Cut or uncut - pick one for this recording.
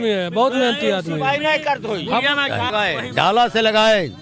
cut